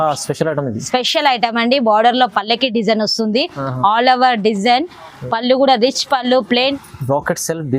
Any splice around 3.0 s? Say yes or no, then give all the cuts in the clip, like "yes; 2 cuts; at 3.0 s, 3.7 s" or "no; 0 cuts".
no; 1 cut; at 6.7 s